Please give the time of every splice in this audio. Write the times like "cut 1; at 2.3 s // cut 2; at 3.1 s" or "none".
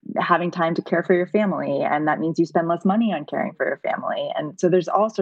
none